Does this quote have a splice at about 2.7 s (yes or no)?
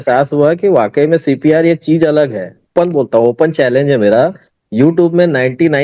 yes